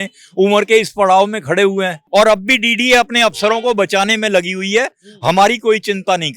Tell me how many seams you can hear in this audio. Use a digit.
1